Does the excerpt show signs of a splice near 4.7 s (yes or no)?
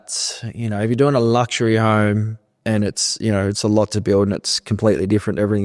no